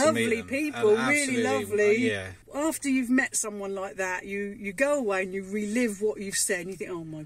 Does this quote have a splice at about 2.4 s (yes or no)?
yes